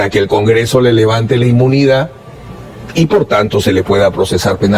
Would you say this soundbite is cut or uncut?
uncut